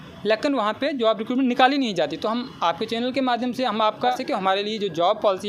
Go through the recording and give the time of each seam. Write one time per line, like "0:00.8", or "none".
0:04.2